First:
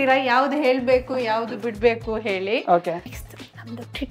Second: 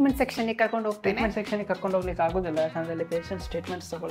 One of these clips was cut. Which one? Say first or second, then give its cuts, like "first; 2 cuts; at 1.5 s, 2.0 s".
first; 1 cut; at 3.1 s